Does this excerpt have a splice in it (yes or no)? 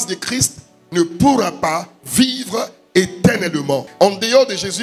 yes